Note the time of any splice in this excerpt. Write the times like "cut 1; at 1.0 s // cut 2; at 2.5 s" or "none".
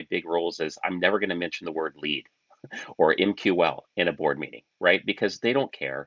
none